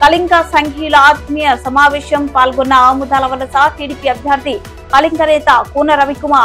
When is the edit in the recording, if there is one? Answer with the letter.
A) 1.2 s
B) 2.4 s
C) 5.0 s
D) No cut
D